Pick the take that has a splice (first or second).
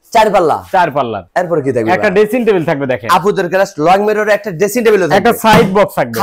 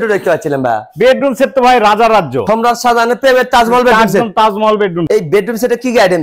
second